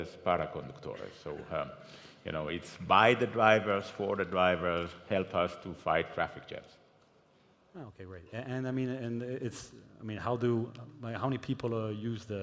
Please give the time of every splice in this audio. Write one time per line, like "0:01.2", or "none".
0:07.3

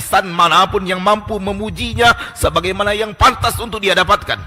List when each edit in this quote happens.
none

